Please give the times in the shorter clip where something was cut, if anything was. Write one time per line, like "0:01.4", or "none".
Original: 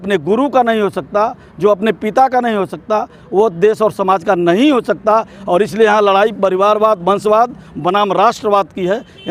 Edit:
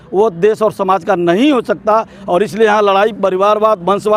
none